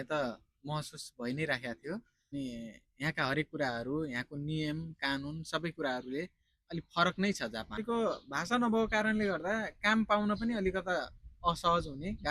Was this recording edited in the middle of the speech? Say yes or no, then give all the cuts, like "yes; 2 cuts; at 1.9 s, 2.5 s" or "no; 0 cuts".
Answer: yes; 2 cuts; at 2.3 s, 7.8 s